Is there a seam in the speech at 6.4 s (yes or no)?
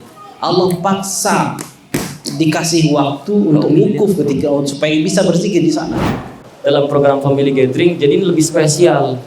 yes